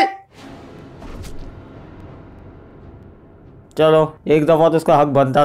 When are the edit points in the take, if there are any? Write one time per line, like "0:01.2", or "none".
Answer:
none